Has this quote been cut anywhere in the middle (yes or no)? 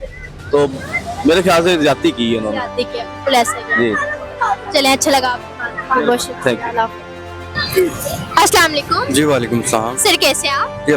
no